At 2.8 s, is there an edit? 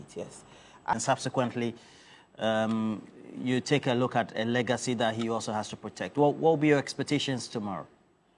no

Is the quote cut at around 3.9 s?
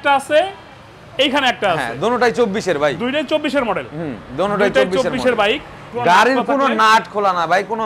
no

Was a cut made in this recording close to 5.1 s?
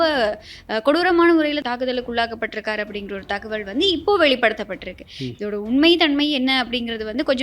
no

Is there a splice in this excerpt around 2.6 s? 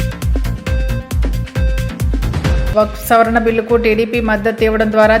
yes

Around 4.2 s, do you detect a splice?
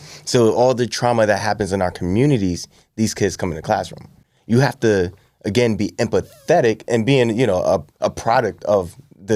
no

